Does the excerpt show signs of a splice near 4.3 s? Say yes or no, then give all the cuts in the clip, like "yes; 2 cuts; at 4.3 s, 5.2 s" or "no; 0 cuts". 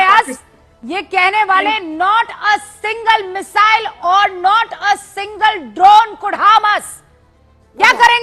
no; 0 cuts